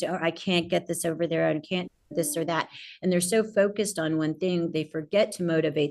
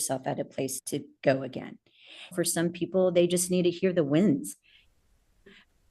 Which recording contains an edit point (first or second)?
second